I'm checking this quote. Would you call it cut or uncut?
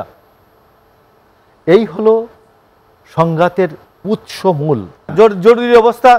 cut